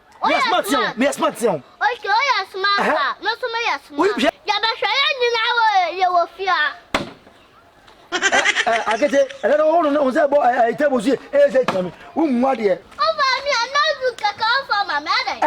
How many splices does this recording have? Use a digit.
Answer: 2